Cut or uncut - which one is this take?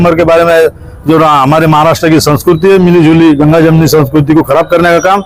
uncut